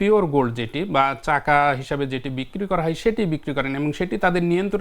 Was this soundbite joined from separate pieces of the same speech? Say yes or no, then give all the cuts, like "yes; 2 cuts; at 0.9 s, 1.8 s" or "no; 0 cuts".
no; 0 cuts